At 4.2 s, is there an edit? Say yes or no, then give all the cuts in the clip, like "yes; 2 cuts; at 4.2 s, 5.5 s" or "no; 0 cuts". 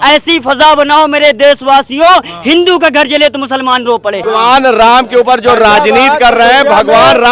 yes; 1 cut; at 4.2 s